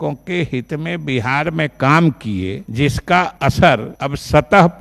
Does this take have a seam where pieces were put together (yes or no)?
yes